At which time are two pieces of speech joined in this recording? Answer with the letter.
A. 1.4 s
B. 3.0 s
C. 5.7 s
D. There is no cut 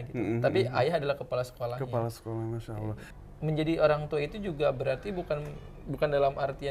B